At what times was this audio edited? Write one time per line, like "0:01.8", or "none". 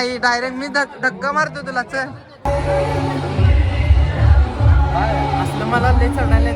0:02.3